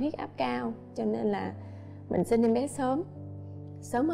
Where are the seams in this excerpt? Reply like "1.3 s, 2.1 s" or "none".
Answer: none